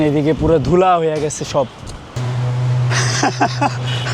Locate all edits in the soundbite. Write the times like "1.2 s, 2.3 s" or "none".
2.2 s